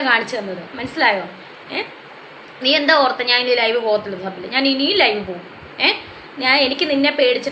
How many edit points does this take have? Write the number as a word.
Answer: one